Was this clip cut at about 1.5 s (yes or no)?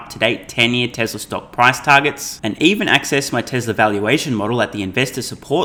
no